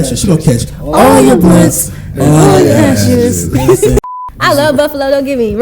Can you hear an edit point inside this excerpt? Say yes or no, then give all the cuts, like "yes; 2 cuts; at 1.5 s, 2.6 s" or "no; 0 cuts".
yes; 1 cut; at 4.0 s